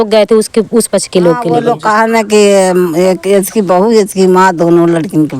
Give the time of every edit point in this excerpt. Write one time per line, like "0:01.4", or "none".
0:01.6